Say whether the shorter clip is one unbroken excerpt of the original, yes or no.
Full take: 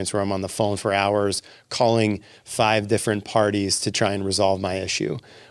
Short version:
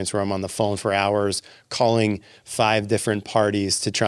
yes